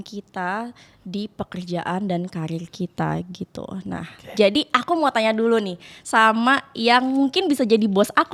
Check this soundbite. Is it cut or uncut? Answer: uncut